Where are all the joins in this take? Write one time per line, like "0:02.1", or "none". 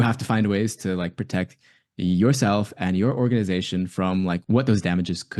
0:04.4